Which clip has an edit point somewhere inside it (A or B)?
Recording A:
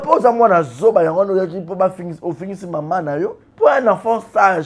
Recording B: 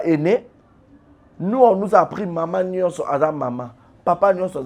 A